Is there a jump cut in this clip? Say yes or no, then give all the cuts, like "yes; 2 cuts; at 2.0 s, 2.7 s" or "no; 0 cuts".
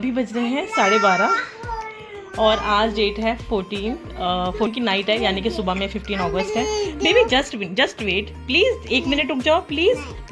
no; 0 cuts